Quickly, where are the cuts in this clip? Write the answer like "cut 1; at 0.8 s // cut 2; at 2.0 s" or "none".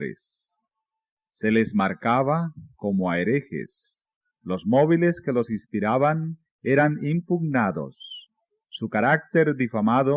cut 1; at 2.5 s